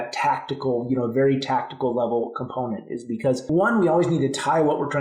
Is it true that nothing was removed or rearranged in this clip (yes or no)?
no